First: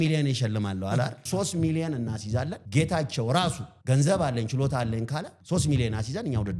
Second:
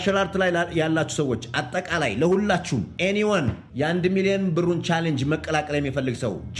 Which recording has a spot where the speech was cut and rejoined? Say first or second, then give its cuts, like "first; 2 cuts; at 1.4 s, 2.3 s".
first; 4 cuts; at 1.2 s, 2.6 s, 3.7 s, 5.3 s